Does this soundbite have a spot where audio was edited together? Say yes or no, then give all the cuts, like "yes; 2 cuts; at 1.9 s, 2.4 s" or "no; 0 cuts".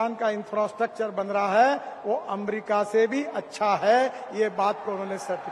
no; 0 cuts